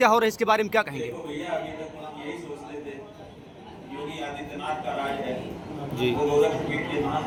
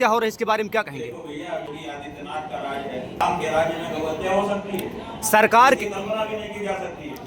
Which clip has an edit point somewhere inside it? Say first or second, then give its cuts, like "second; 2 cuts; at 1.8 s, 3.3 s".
second; 2 cuts; at 1.7 s, 3.2 s